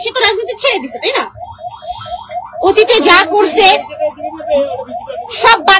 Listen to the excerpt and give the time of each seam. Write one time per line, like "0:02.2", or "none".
none